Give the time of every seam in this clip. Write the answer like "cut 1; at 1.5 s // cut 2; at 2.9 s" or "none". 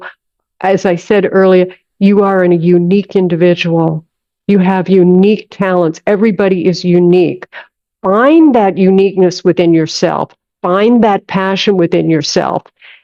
none